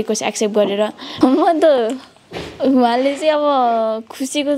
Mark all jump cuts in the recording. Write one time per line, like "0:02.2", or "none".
0:01.0